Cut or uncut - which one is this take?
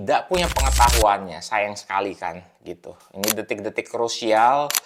uncut